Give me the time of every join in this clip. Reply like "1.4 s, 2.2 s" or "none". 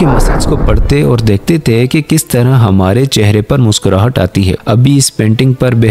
4.6 s

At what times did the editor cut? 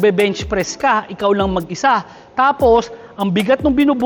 none

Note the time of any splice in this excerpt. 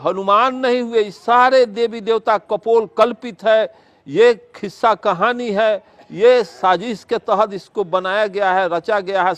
none

